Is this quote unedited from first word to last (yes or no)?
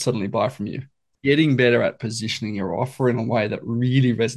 no